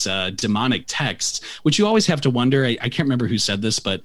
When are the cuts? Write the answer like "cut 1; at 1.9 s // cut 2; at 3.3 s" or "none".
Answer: none